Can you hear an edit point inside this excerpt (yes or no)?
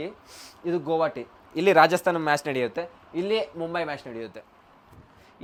no